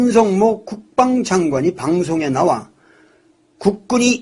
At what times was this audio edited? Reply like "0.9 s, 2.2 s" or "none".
2.9 s